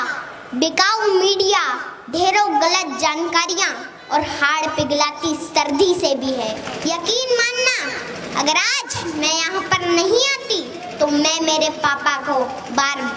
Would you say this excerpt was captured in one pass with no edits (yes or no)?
no